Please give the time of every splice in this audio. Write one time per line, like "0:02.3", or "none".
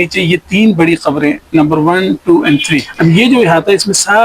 0:02.9